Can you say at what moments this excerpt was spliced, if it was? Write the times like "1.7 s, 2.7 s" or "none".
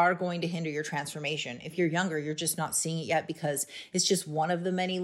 none